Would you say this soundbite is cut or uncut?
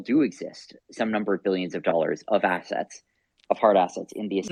uncut